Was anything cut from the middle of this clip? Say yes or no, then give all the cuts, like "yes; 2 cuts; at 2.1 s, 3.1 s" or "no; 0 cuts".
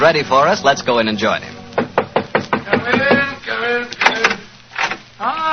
yes; 1 cut; at 1.2 s